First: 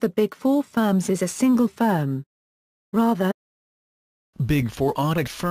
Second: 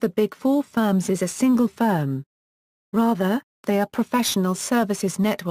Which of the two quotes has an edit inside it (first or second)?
second